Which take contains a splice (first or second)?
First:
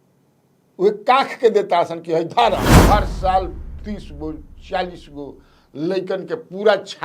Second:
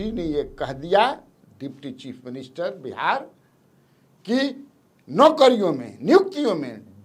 first